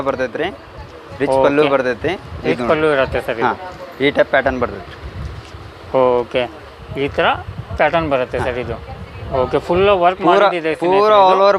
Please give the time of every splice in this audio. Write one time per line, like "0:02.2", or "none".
none